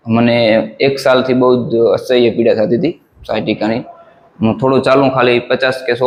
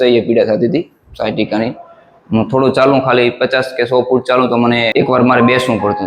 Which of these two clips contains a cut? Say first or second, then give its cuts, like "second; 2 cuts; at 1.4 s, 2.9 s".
second; 1 cut; at 4.9 s